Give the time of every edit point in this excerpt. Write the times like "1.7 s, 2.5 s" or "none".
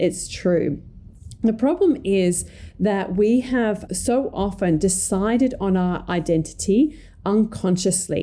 3.8 s